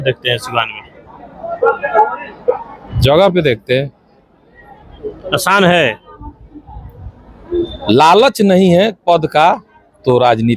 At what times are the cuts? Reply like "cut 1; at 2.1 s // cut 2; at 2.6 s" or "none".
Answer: none